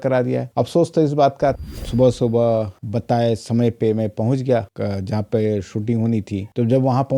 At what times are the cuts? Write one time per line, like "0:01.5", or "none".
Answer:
0:01.6